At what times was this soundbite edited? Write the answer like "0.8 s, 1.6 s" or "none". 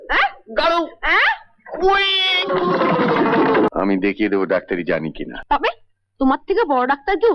3.7 s

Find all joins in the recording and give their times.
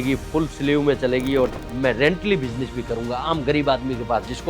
1.5 s

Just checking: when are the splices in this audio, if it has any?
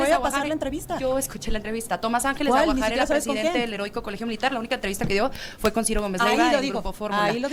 none

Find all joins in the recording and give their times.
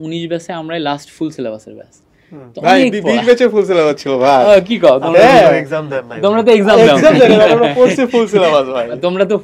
none

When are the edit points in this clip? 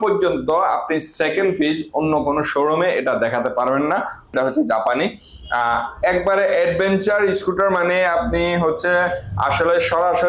4.3 s

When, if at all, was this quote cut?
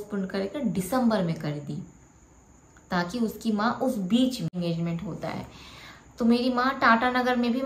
4.5 s

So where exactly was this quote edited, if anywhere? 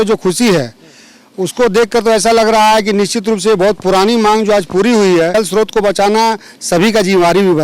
5.3 s

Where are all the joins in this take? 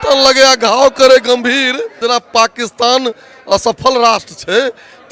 2.0 s

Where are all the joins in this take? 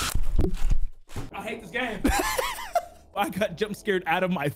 1.2 s

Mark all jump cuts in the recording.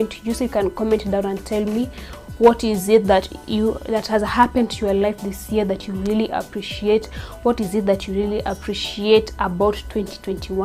none

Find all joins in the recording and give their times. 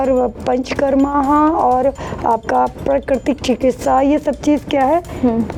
none

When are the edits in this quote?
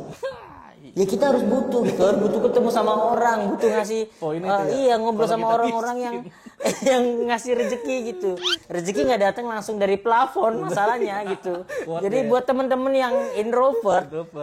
11.8 s

